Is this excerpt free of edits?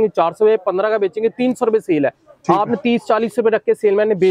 yes; 0 cuts

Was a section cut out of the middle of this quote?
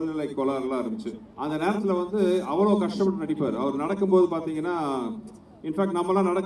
yes; 1 cut; at 1.2 s

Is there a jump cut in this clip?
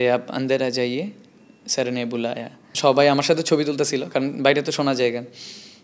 yes; 1 cut; at 2.7 s

